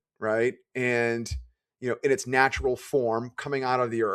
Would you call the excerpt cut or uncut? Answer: uncut